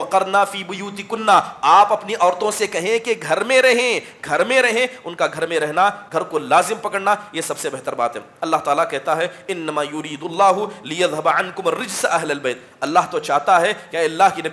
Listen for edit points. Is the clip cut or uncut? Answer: uncut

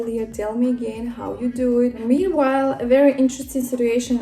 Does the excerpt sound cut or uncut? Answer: cut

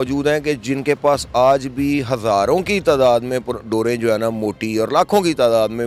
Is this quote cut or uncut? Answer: uncut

